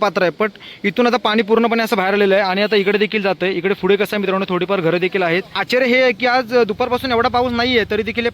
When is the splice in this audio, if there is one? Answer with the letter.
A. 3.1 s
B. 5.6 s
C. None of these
B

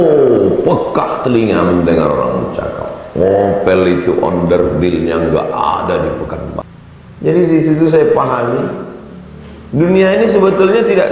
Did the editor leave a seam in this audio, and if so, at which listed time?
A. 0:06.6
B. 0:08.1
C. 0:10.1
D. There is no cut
A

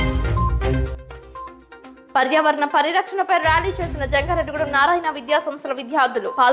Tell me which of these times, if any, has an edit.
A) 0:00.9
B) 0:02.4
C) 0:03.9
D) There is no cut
A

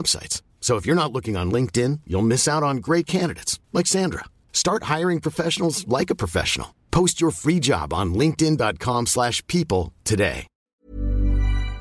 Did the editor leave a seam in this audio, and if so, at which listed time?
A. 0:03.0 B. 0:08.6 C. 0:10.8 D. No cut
C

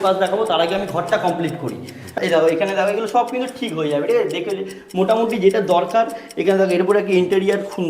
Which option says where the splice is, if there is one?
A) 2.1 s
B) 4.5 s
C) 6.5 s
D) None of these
A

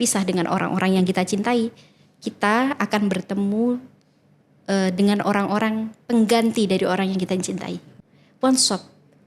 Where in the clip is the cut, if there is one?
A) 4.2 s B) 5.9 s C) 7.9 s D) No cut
C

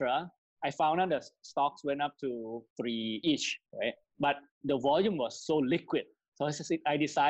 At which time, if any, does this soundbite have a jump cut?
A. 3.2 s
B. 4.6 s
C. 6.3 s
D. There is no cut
A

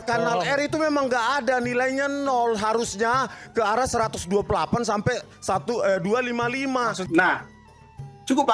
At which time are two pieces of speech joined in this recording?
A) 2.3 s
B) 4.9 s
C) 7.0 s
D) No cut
C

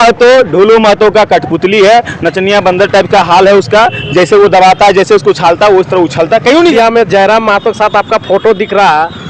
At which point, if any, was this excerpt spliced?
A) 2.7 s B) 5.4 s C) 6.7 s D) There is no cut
C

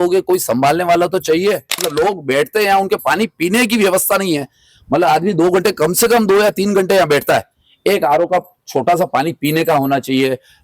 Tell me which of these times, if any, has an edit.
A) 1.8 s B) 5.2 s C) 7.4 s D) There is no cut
A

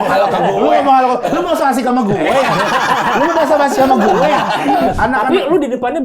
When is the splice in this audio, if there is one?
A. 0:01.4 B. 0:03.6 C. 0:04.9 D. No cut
C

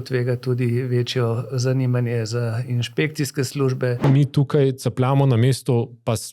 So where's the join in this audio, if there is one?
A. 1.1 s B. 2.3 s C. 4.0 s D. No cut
C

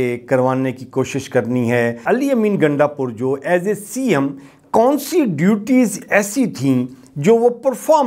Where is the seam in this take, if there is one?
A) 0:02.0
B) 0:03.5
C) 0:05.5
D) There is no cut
A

